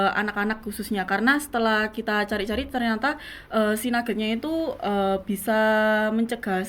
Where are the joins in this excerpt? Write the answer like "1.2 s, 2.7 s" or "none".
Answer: none